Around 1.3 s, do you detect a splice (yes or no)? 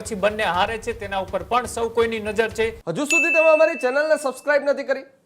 no